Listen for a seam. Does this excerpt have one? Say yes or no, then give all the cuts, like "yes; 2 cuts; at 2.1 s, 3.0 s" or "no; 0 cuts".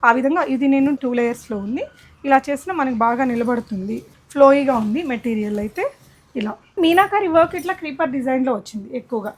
yes; 3 cuts; at 1.0 s, 4.1 s, 6.8 s